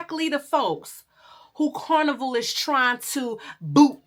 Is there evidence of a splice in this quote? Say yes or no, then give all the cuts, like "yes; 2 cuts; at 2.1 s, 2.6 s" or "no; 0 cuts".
no; 0 cuts